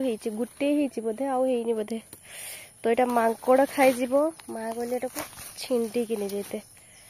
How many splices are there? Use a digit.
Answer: 0